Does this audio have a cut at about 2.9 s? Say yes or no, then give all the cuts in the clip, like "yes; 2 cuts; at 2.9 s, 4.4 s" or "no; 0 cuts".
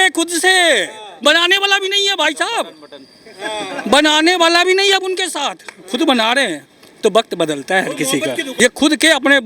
no; 1 cut; at 8.5 s